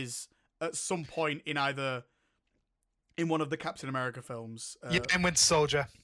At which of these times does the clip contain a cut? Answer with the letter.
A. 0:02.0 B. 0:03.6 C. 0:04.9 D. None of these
D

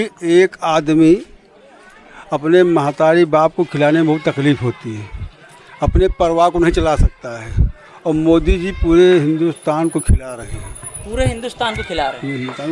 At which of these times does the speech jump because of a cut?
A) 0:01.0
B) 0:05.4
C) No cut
C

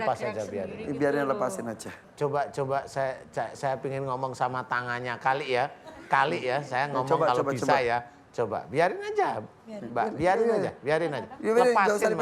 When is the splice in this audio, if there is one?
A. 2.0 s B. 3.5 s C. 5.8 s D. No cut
A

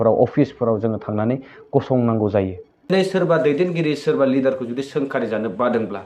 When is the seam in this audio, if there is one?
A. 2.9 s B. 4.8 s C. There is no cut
A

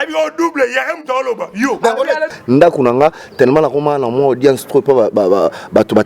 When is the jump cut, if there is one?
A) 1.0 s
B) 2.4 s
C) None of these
B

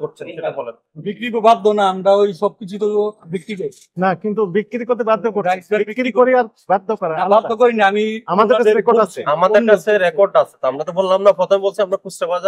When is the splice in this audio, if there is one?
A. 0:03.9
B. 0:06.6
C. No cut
A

